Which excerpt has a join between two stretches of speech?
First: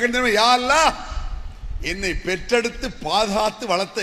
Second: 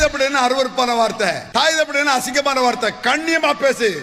second; 1 cut; at 1.4 s

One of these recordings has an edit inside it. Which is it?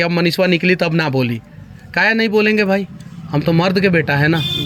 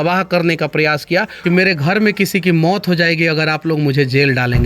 second; 1 cut; at 1.3 s

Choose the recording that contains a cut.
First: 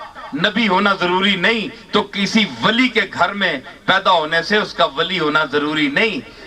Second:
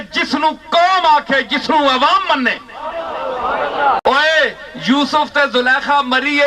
second; 1 cut; at 4.0 s

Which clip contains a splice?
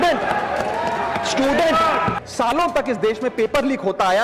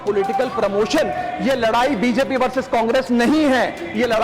first; 1 cut; at 2.2 s

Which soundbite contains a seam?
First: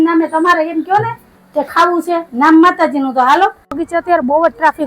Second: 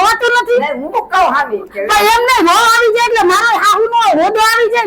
first; 1 cut; at 3.8 s

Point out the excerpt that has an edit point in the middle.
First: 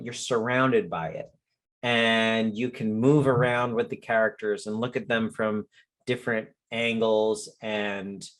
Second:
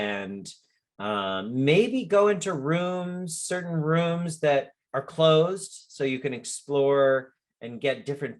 second; 1 cut; at 4.8 s

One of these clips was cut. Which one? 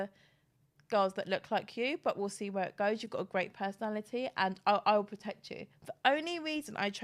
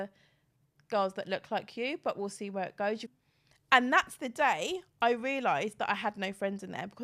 second; 1 cut; at 3.2 s

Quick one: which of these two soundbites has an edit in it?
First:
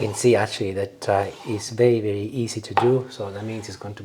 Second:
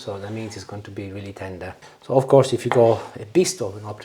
second; 1 cut; at 1.9 s

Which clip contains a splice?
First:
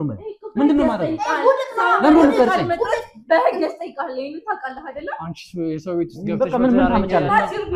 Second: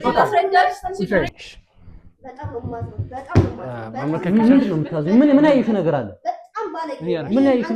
second; 1 cut; at 1.3 s

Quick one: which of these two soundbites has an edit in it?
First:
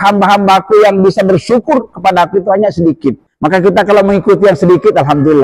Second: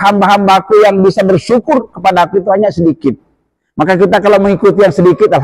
first; 1 cut; at 3.3 s

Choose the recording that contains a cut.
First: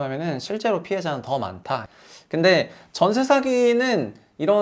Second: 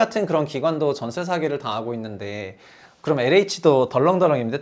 first; 1 cut; at 1.9 s

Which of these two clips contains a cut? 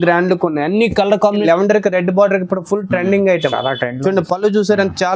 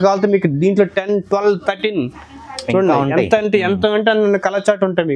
first; 1 cut; at 1.4 s

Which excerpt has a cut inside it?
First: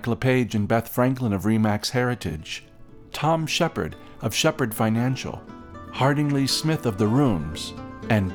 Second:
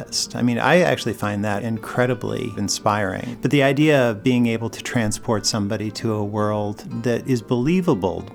second; 3 cuts; at 1.6 s, 3.0 s, 6.9 s

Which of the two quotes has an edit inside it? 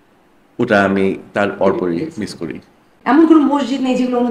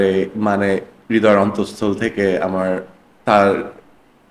first; 1 cut; at 2.9 s

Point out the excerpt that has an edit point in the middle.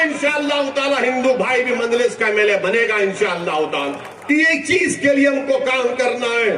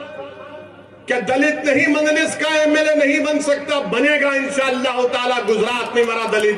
first; 1 cut; at 4.1 s

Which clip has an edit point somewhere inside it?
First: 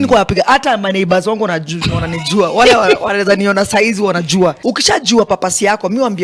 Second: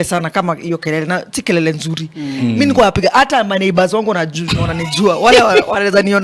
first; 1 cut; at 4.6 s

